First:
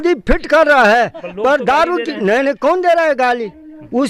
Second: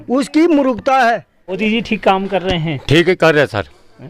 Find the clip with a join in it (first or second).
second